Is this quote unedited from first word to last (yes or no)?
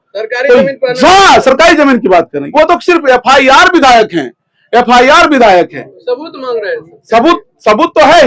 no